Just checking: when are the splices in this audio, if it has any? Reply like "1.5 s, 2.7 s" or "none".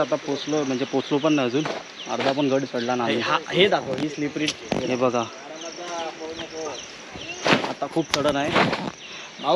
none